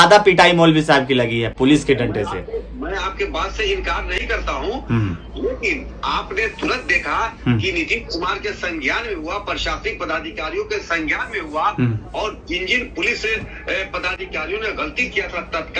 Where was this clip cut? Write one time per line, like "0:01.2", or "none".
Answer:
none